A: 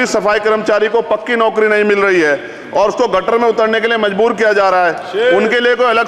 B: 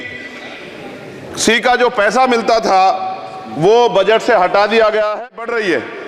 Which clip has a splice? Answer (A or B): B